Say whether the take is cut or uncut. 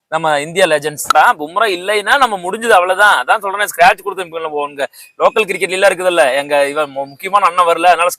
cut